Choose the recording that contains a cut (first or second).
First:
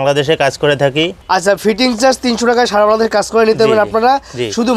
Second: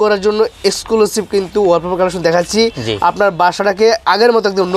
first